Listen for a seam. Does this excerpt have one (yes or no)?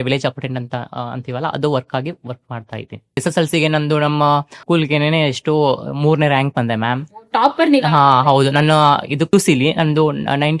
yes